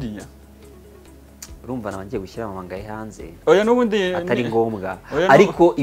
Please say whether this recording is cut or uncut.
uncut